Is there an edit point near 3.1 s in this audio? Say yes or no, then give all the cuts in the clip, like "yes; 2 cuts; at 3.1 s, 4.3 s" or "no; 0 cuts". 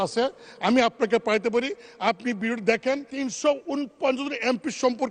yes; 1 cut; at 3.1 s